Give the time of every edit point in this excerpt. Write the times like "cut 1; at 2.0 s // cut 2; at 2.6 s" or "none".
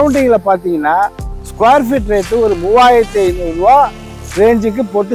none